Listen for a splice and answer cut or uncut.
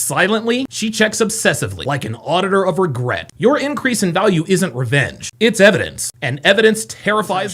uncut